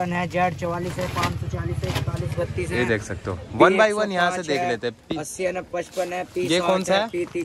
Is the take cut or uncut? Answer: uncut